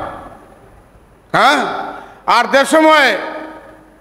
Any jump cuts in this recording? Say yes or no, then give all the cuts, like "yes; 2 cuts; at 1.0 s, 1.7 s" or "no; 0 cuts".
no; 0 cuts